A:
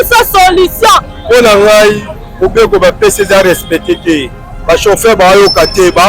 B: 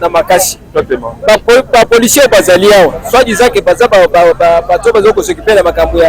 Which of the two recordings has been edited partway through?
A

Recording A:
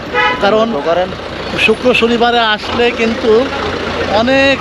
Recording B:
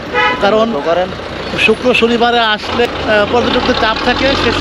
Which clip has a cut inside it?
B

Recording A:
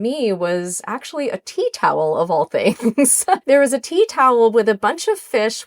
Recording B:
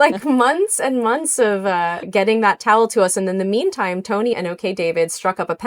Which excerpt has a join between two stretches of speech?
A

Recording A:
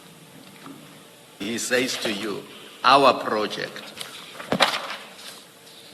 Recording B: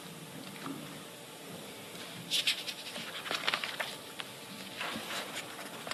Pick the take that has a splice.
A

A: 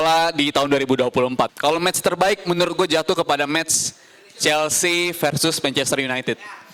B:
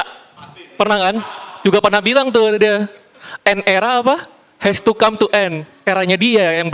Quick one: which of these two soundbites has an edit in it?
A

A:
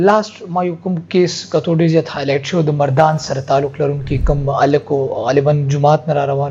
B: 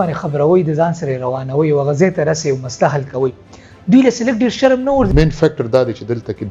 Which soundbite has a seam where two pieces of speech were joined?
B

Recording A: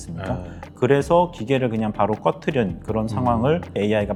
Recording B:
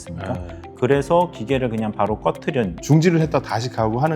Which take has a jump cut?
B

